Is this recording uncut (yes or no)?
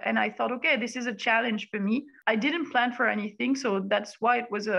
no